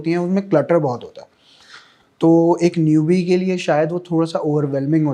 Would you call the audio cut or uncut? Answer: uncut